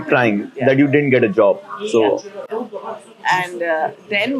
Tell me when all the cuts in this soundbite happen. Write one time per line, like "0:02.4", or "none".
none